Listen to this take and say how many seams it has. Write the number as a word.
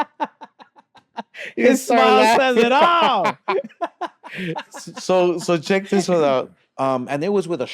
one